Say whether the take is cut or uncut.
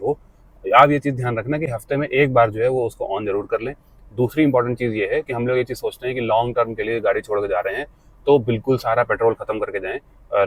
uncut